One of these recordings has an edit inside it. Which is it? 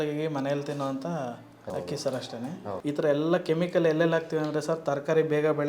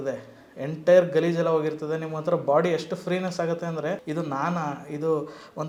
first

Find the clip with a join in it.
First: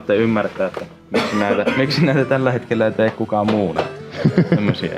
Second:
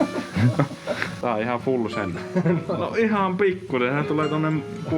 second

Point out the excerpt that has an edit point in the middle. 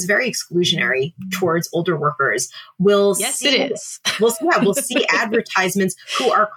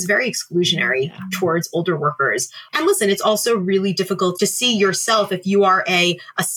second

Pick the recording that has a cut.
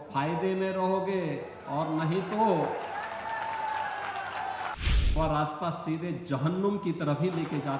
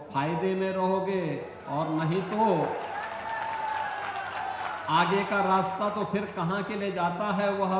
first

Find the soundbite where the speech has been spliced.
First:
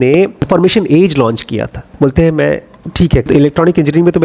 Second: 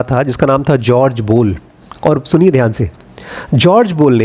first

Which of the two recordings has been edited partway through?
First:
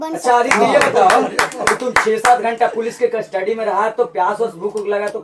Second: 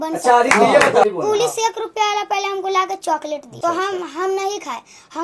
second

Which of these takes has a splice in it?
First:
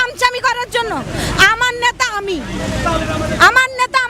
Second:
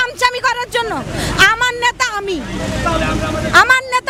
first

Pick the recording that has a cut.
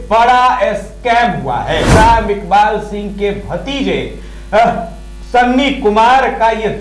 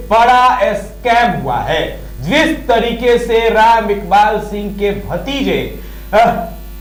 first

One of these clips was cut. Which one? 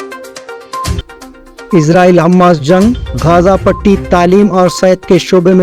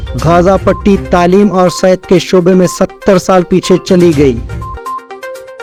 first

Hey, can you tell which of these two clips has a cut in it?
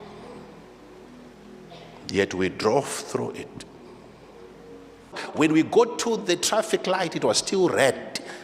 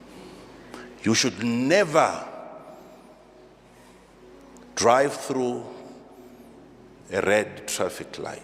first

